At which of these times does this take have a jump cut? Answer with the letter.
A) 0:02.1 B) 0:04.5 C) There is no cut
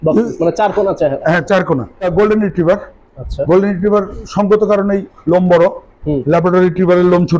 A